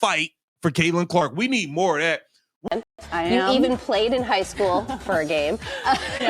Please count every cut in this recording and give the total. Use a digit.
1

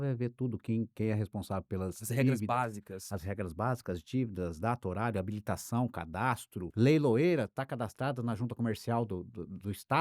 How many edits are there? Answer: 1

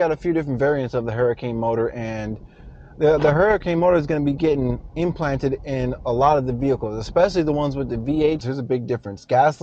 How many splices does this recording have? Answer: 1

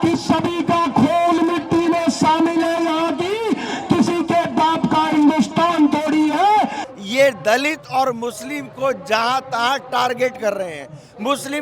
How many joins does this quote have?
1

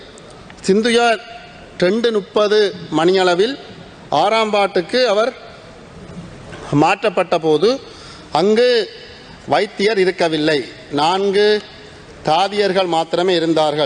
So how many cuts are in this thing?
0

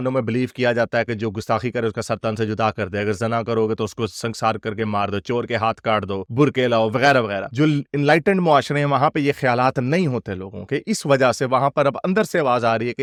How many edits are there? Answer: 0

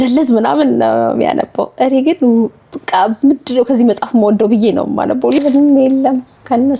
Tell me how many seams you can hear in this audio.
1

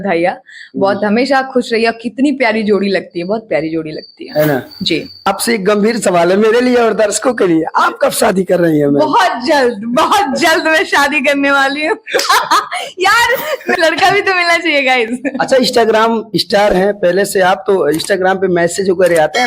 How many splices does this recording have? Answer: 2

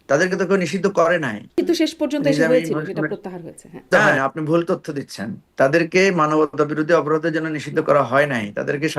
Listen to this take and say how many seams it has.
2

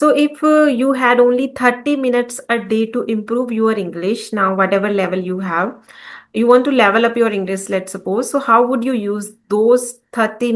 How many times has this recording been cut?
0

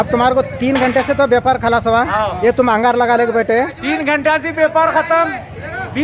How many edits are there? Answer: 0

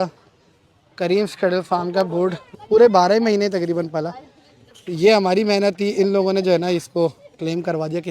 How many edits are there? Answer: 1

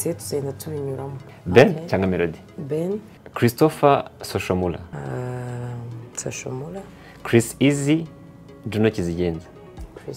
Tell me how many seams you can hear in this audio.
3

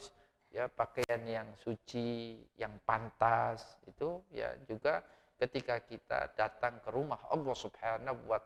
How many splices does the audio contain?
0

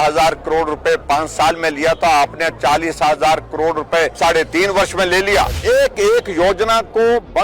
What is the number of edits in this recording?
2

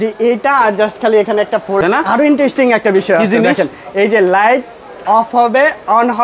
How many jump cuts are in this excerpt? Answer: 0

